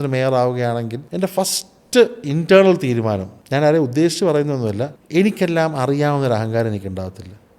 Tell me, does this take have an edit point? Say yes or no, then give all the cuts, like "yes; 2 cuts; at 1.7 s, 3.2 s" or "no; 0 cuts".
yes; 3 cuts; at 1.0 s, 3.3 s, 4.9 s